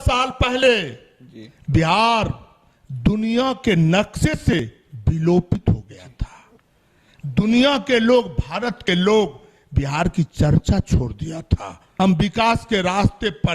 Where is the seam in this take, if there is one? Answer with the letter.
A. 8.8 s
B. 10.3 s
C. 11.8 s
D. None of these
C